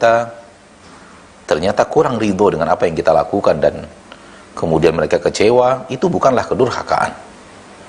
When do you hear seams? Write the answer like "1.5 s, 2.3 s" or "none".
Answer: none